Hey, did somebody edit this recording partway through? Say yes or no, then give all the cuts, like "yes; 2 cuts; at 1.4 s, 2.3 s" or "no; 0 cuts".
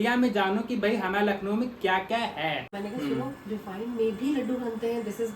yes; 1 cut; at 2.7 s